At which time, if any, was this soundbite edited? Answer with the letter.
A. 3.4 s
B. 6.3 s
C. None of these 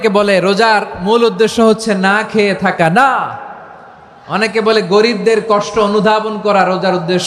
C